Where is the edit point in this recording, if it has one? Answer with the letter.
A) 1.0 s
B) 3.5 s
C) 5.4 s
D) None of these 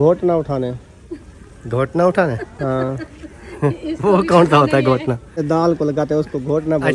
C